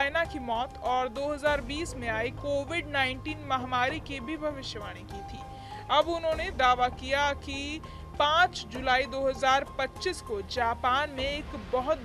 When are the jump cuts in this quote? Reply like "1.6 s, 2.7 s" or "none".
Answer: none